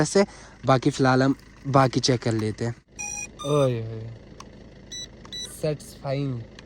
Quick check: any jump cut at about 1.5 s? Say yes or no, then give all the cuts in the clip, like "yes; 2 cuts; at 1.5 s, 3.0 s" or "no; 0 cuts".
no; 1 cut; at 2.8 s